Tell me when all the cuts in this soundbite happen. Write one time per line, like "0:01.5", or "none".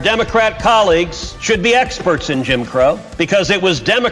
0:01.3
0:03.1